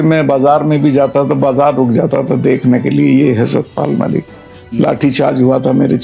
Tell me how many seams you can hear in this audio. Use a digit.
0